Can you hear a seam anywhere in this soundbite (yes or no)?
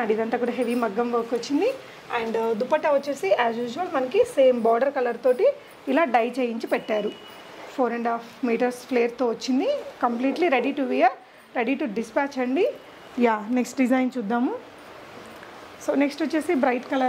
no